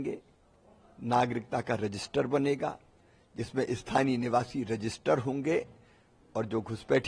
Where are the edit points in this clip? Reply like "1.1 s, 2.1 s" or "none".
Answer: none